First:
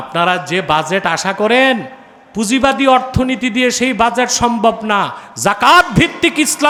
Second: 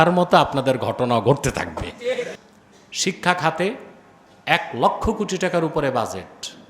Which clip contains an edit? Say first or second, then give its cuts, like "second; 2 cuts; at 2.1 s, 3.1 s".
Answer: second; 1 cut; at 2.4 s